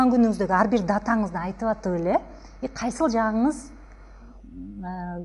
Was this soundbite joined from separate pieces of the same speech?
no; 0 cuts

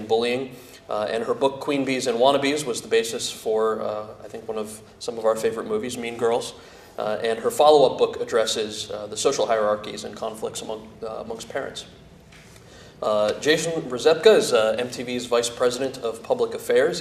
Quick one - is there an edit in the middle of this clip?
no; 0 cuts

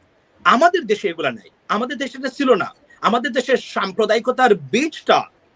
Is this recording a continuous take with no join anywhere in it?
yes; 0 cuts

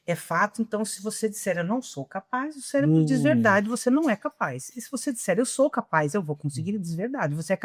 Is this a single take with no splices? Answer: yes; 0 cuts

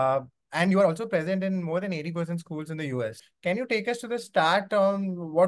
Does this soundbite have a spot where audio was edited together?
yes; 1 cut; at 3.3 s

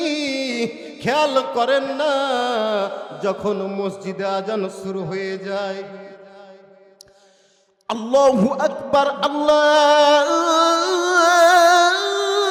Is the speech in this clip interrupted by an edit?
no; 0 cuts

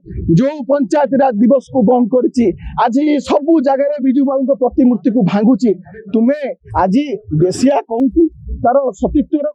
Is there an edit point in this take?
no; 0 cuts

